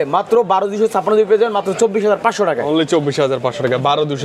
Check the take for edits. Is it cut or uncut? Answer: uncut